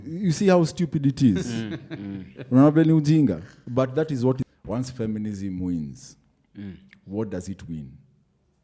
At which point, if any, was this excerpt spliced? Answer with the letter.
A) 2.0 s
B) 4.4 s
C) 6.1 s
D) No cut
B